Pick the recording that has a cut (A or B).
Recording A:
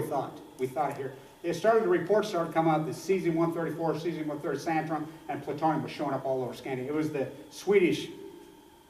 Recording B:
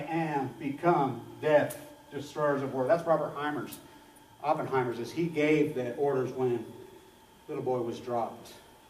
B